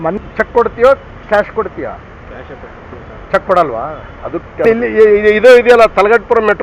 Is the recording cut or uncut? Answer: uncut